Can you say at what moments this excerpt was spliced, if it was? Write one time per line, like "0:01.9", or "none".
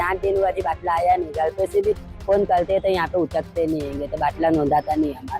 none